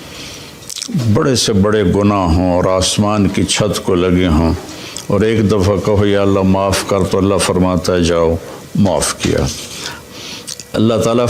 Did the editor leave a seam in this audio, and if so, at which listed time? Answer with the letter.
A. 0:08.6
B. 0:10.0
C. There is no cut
B